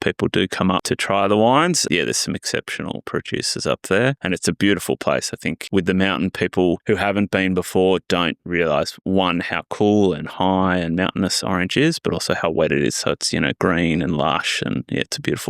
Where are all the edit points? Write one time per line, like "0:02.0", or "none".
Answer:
0:00.8
0:01.8
0:03.0
0:04.2
0:05.5
0:06.8